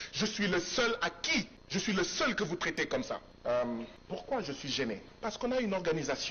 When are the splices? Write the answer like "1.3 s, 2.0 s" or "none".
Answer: 1.6 s, 3.3 s, 4.0 s, 5.1 s